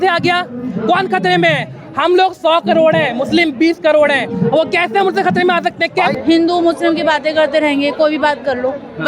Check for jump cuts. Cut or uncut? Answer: cut